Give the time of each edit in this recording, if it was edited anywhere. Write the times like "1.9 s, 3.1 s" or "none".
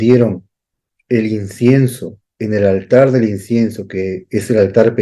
none